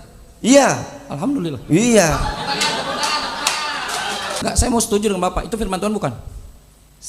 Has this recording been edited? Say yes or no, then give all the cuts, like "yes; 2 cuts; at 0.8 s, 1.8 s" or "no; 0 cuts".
yes; 1 cut; at 4.4 s